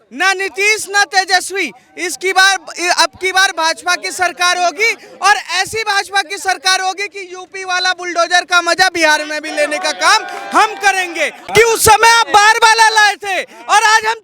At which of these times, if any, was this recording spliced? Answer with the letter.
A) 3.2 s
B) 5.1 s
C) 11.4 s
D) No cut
C